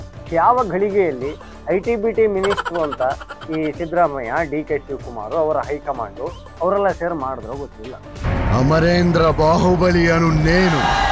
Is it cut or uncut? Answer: uncut